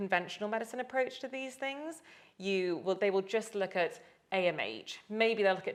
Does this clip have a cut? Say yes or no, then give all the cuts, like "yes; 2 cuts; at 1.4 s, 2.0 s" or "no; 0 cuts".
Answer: no; 0 cuts